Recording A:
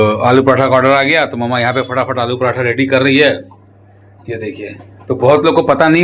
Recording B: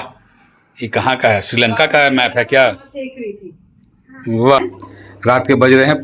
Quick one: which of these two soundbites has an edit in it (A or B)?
B